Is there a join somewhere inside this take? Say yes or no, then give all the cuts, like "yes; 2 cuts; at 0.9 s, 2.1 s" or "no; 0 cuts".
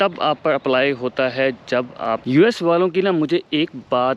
yes; 1 cut; at 2.3 s